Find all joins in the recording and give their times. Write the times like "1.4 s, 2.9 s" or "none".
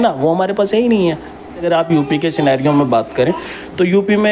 1.6 s